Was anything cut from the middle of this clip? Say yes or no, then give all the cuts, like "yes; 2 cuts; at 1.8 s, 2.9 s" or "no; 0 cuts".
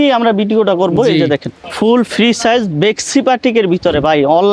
yes; 1 cut; at 1.7 s